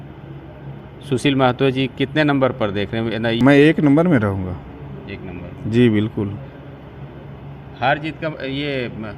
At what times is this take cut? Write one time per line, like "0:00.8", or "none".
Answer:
0:03.4